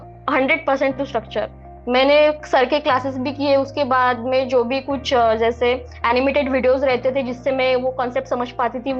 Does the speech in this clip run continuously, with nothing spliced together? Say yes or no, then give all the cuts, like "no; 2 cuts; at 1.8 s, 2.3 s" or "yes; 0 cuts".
yes; 0 cuts